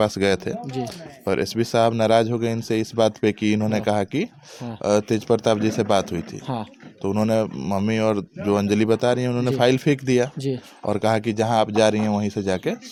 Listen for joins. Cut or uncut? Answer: uncut